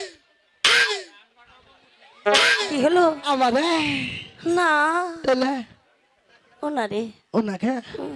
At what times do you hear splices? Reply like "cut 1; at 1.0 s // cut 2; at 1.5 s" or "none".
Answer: none